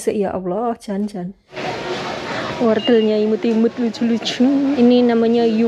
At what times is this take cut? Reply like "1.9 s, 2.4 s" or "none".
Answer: 1.6 s, 4.8 s